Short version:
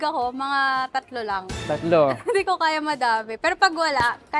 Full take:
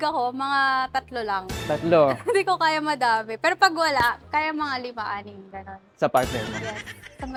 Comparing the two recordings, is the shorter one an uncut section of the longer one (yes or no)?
yes